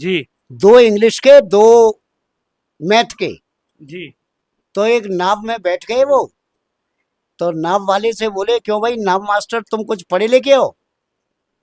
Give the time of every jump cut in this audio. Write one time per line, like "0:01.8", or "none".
none

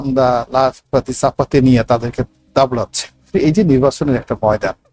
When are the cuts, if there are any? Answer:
0:03.3

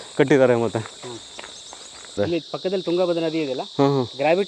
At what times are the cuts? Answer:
0:02.2

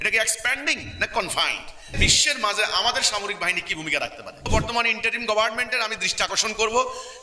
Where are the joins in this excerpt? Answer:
0:02.0
0:04.5

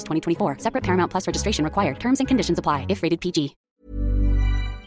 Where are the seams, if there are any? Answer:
0:03.6

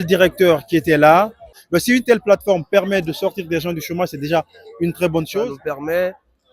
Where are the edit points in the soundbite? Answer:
0:01.5
0:05.5

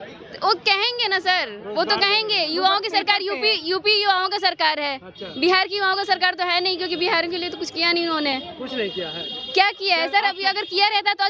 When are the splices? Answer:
none

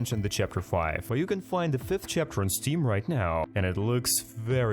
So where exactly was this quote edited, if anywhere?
0:01.1

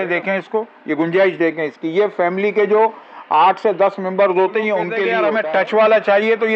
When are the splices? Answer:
0:05.1

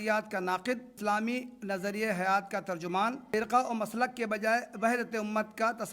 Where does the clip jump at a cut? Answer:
0:00.9
0:03.2

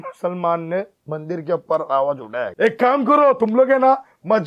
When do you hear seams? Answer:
0:02.5

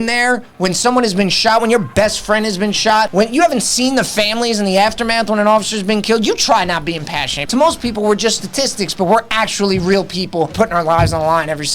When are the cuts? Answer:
0:03.1
0:07.4
0:10.5

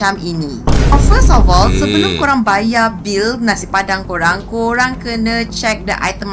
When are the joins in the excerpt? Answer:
none

